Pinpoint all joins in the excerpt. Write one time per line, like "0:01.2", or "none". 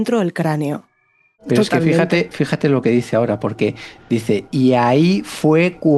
0:01.3